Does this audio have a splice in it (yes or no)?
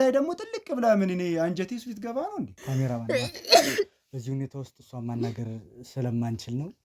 yes